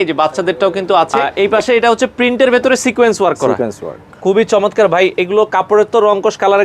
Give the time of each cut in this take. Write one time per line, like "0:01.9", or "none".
0:01.3